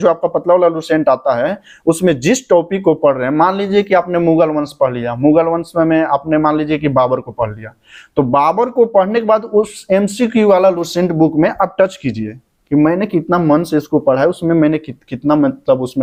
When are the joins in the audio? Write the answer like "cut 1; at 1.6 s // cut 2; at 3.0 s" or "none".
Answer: none